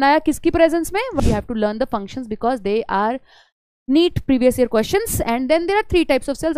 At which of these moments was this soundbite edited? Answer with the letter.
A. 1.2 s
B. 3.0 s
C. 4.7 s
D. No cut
A